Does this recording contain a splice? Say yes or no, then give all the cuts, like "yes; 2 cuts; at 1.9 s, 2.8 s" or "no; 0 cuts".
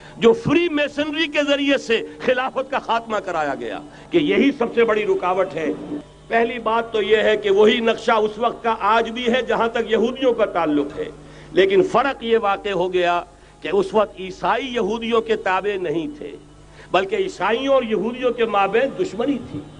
yes; 1 cut; at 5.9 s